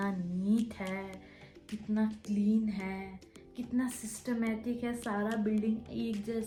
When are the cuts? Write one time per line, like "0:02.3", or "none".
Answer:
none